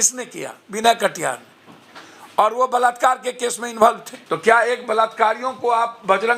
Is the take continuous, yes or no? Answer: no